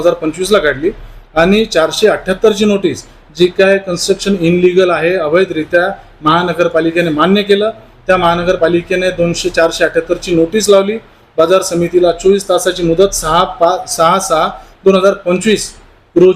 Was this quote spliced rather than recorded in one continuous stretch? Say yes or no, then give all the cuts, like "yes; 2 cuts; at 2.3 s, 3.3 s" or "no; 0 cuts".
no; 0 cuts